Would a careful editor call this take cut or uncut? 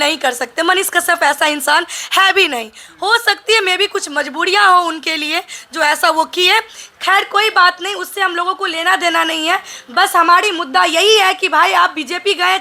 uncut